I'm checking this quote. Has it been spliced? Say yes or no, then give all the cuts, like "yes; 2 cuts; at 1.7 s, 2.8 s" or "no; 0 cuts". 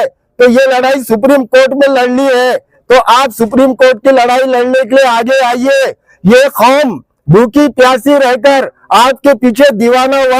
no; 0 cuts